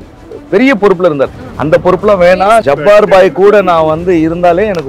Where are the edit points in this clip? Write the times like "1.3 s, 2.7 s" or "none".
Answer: 2.6 s